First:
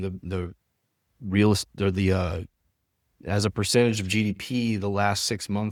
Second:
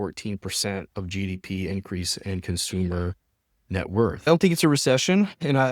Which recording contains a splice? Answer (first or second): second